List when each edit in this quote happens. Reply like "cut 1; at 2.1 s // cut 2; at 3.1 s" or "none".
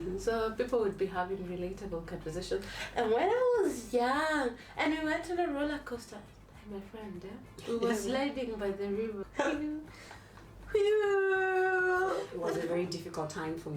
cut 1; at 9.2 s // cut 2; at 12.3 s